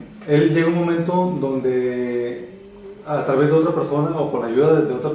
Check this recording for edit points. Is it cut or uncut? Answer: cut